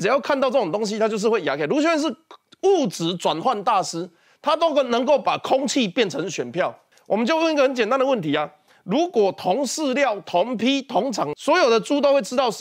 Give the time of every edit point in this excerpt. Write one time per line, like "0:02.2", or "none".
0:11.4